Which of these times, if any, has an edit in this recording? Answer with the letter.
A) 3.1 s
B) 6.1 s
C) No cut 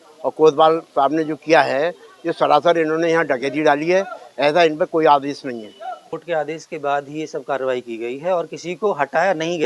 B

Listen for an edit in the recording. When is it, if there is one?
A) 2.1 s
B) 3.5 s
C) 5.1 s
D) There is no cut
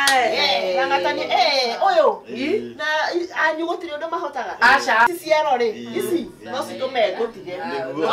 C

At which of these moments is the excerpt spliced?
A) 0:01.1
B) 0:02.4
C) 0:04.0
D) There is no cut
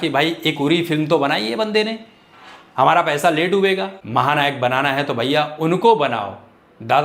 C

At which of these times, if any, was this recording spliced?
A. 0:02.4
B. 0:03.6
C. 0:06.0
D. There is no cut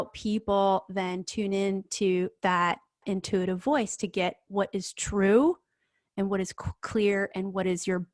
D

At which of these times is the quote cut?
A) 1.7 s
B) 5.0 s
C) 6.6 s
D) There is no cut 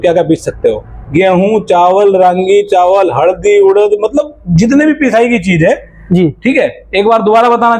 D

